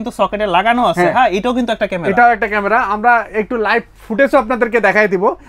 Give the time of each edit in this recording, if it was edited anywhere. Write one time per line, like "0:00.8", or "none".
none